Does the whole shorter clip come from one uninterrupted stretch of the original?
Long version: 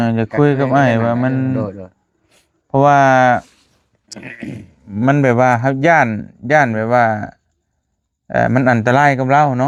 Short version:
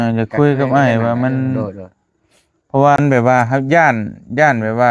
no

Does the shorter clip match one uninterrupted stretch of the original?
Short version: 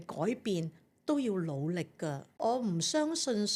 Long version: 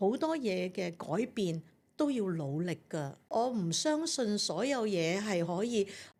yes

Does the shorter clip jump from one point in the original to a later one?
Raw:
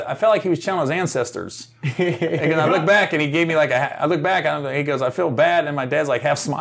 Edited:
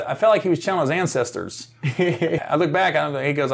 yes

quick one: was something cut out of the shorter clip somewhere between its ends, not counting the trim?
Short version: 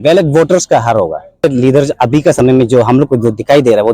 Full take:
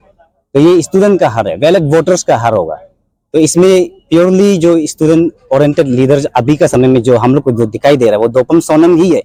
yes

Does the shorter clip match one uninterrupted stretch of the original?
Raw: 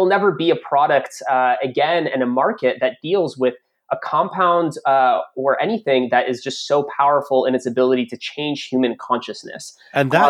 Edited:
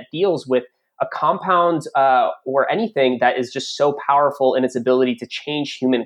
yes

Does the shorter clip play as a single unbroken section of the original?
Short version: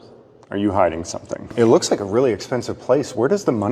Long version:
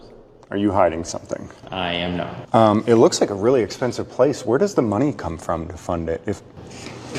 no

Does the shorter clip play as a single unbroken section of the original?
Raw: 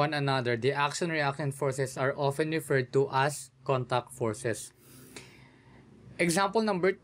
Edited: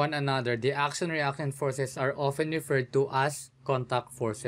yes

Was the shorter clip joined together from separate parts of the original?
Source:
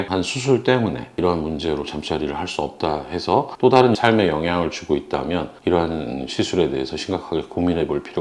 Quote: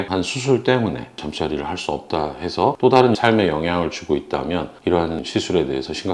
yes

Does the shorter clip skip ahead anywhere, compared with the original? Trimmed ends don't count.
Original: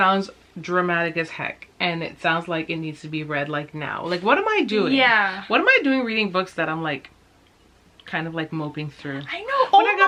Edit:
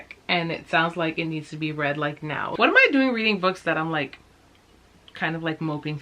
yes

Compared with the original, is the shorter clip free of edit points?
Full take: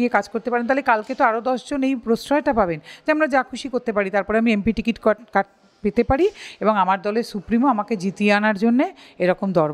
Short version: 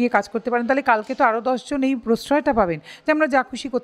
yes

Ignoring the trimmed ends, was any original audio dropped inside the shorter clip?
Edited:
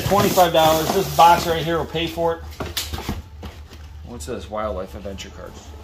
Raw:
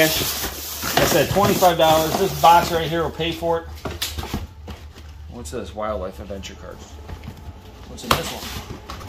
no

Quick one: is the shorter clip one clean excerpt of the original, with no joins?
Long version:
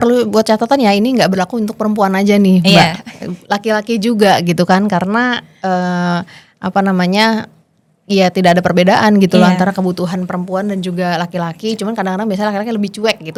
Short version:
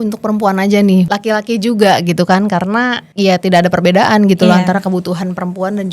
no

